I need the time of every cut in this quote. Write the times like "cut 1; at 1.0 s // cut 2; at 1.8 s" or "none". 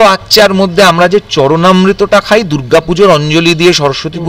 none